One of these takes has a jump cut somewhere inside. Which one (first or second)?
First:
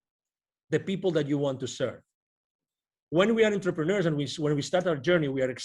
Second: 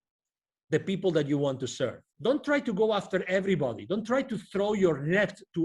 second